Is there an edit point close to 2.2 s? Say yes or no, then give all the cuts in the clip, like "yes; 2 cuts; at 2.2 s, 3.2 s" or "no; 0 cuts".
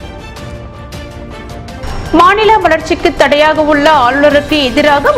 no; 1 cut; at 1.0 s